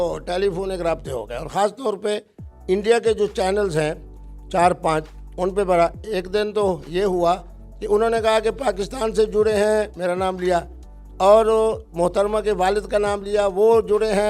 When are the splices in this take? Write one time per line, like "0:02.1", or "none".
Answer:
none